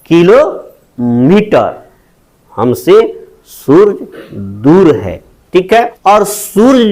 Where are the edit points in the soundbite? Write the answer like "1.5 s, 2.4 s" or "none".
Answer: 5.9 s